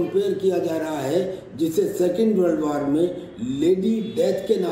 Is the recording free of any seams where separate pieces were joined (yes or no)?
yes